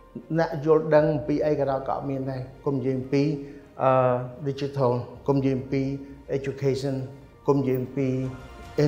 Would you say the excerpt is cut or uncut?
uncut